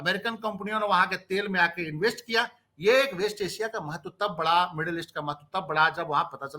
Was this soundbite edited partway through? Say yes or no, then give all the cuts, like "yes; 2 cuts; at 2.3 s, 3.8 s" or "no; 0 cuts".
no; 0 cuts